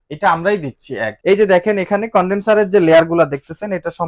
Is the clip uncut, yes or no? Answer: no